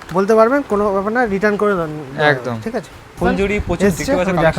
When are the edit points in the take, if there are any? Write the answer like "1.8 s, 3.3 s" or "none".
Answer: 3.2 s